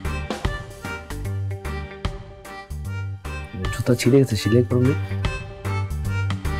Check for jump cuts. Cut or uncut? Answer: uncut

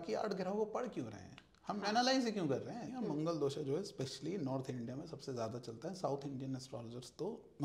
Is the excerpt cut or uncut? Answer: cut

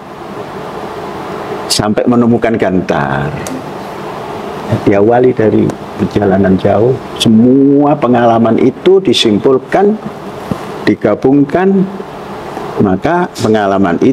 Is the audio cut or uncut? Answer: uncut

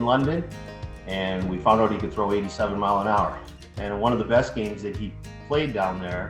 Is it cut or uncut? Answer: cut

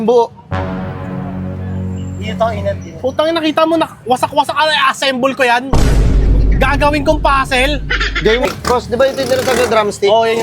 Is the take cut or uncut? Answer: cut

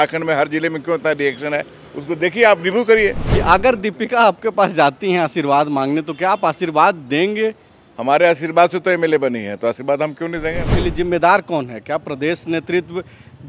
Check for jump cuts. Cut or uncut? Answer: cut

